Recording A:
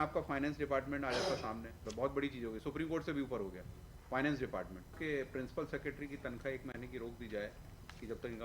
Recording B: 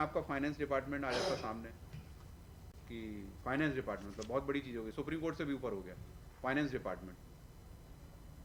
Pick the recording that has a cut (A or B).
A